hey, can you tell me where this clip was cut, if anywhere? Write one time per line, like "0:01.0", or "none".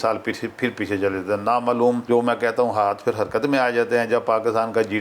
0:02.0

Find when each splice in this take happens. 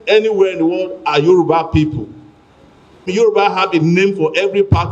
0:03.1

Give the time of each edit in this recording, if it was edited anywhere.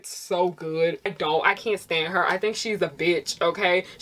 0:01.1

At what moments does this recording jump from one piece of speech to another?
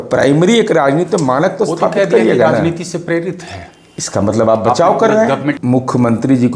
0:05.6

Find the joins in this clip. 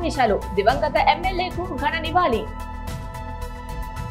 0:03.1

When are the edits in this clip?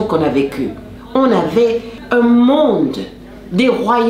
0:01.9

